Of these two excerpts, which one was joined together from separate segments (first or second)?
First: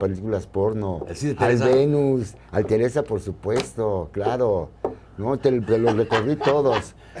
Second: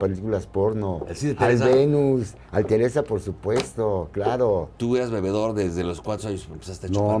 second